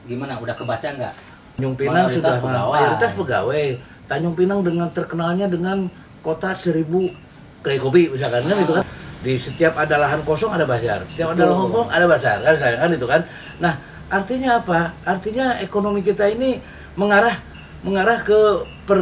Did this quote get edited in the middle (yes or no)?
yes